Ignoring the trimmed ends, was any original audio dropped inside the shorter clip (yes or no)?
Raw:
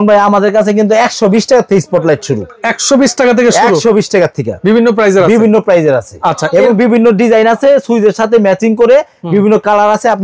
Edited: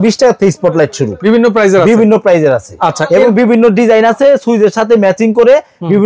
yes